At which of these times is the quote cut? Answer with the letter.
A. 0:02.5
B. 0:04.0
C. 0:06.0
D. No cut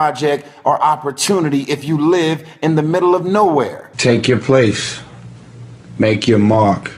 B